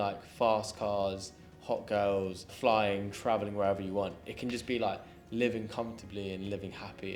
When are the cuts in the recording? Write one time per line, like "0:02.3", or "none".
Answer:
0:02.5